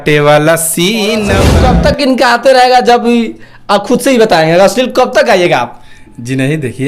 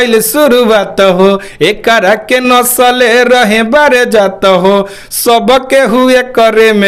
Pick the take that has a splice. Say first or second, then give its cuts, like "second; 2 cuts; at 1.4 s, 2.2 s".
first; 1 cut; at 1.5 s